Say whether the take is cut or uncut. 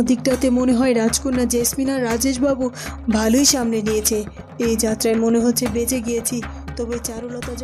uncut